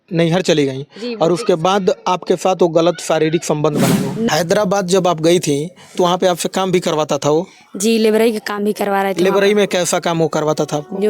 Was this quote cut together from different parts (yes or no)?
yes